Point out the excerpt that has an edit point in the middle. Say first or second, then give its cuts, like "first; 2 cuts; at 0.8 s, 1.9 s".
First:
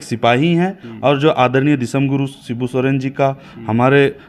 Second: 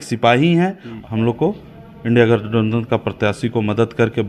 second; 1 cut; at 0.9 s